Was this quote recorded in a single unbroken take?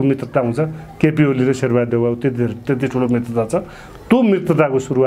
yes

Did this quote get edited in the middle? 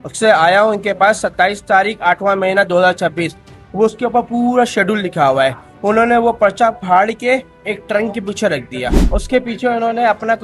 no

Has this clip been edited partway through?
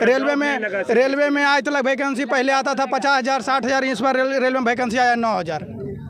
no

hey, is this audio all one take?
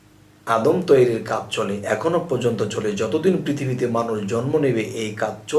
yes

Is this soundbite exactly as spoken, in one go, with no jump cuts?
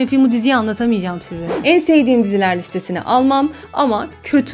no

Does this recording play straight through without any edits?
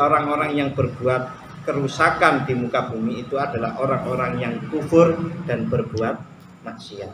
yes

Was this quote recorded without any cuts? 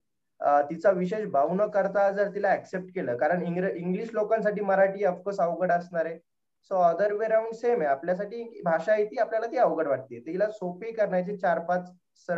yes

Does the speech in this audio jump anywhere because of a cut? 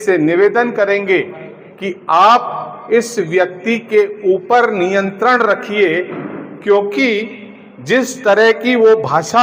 no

